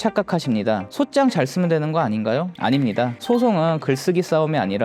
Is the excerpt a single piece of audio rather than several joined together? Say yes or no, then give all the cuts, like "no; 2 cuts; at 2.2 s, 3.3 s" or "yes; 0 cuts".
yes; 0 cuts